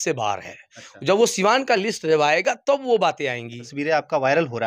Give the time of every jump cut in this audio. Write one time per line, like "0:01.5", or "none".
0:03.7